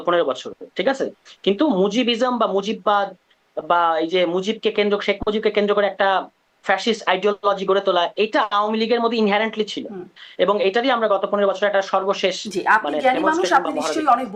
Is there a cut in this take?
no; 0 cuts

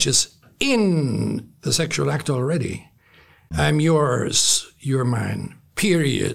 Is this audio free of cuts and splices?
no; 1 cut; at 3.5 s

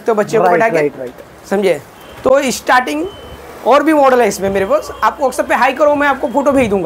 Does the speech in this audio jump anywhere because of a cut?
no; 0 cuts

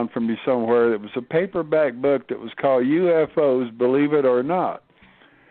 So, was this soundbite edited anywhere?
yes; 1 cut; at 3.8 s

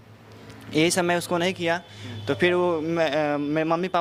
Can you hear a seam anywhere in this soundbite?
no; 0 cuts

